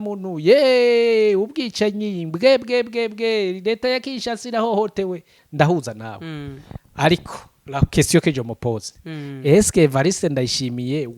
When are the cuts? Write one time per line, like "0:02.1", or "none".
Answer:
0:05.4